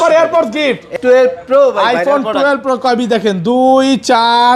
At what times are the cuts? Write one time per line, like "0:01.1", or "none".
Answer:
0:00.9